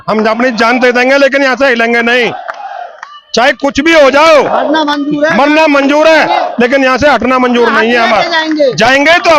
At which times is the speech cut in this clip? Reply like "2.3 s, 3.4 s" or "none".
none